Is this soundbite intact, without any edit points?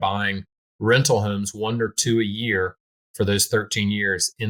yes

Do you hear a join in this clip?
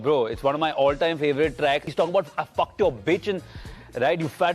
yes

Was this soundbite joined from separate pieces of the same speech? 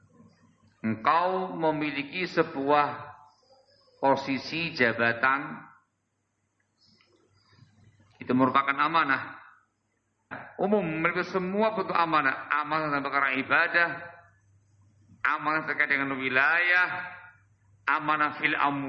yes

